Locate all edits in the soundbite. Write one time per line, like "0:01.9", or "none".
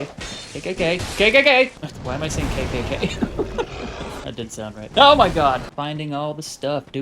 0:01.9
0:04.7
0:05.7